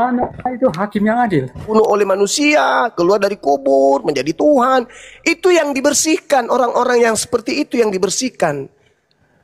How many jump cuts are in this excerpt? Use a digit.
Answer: 1